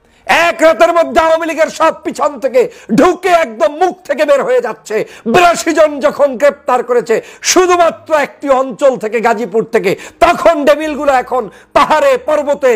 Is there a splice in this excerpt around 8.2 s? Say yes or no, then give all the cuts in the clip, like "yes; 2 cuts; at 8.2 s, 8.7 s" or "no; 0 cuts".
no; 0 cuts